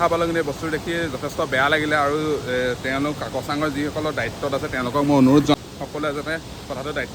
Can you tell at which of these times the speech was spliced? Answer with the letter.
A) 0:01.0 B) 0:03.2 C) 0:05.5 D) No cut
C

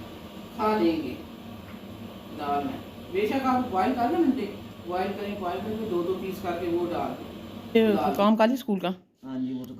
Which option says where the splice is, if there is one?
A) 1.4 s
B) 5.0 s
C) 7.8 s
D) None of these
C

